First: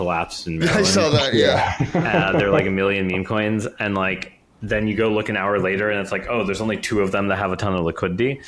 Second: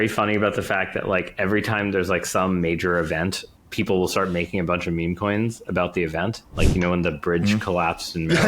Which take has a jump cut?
second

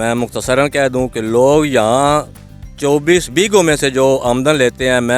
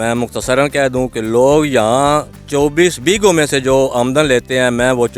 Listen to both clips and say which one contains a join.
second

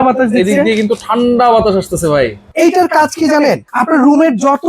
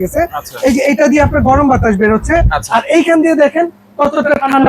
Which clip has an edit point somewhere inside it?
first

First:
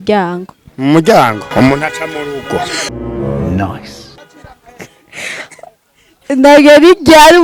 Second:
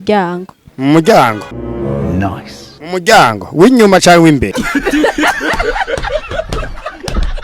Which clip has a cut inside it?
second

